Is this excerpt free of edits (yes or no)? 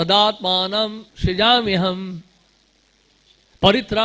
no